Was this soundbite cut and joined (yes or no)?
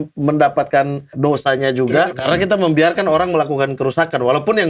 yes